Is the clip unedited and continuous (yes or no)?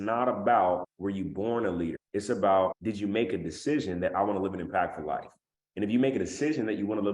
no